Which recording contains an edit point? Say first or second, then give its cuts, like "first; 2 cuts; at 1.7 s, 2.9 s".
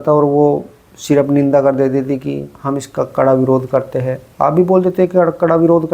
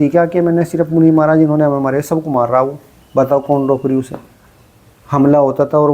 second; 1 cut; at 4.4 s